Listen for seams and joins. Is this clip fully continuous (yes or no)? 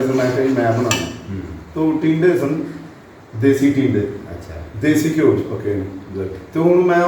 yes